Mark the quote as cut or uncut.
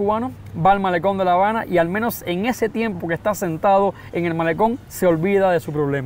uncut